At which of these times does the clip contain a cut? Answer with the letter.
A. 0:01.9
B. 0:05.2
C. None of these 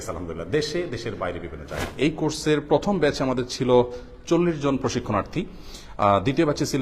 A